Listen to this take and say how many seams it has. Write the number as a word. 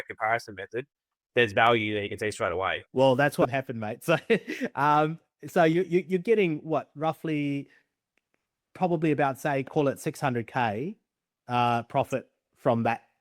one